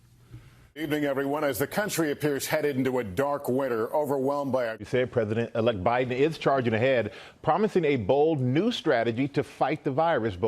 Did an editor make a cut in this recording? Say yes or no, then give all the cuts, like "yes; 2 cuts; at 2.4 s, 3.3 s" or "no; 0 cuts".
yes; 2 cuts; at 0.9 s, 4.7 s